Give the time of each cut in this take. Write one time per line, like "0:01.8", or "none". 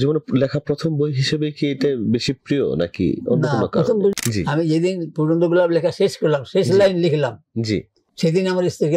0:04.1